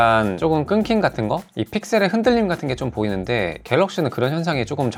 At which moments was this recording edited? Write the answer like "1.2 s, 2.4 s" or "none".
none